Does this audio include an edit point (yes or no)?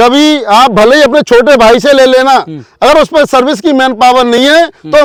no